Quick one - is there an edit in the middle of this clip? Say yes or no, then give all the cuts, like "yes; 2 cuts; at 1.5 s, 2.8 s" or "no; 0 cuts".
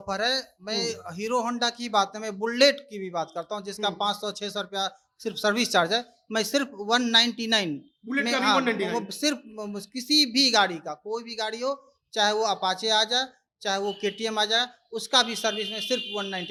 no; 0 cuts